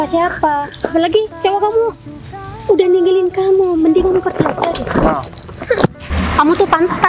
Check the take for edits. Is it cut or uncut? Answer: cut